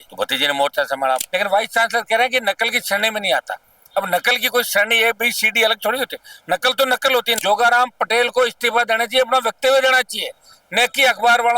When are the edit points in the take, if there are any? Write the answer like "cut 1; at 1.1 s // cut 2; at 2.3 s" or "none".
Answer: cut 1; at 1.2 s // cut 2; at 7.4 s